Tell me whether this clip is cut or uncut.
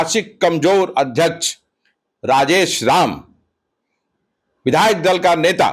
uncut